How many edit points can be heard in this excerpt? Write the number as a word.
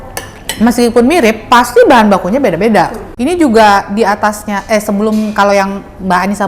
one